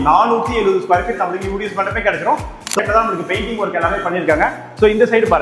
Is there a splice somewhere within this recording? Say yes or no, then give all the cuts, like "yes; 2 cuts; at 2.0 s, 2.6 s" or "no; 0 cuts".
yes; 1 cut; at 2.8 s